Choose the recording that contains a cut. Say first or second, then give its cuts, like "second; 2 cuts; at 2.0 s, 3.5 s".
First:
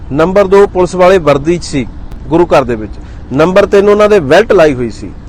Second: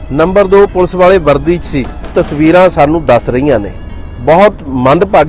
second; 1 cut; at 2.1 s